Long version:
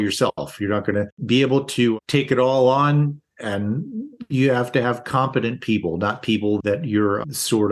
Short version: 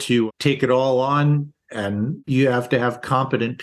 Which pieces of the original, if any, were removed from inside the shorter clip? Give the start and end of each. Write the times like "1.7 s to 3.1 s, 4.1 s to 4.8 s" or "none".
3.9 s to 4.2 s